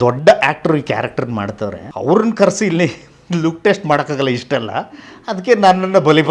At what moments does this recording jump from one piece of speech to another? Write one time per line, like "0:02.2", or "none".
0:01.8